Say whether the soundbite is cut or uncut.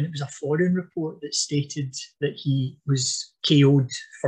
uncut